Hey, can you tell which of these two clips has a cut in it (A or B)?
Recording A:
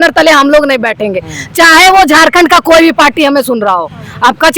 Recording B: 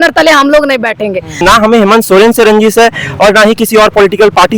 B